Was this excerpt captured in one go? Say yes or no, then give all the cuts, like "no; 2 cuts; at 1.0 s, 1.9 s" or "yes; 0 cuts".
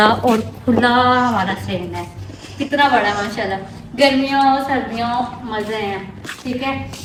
yes; 0 cuts